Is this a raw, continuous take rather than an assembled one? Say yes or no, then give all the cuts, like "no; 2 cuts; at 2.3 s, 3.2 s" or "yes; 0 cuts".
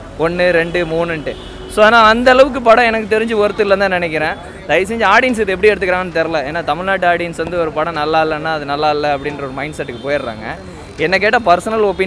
yes; 0 cuts